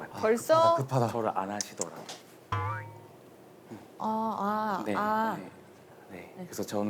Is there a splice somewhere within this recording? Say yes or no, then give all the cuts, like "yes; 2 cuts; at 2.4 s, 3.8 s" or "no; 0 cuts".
no; 0 cuts